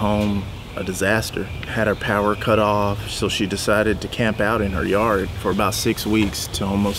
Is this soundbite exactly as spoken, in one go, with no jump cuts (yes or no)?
yes